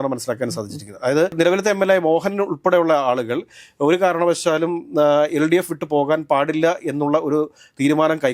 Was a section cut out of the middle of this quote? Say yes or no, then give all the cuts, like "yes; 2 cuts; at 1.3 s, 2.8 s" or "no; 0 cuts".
no; 0 cuts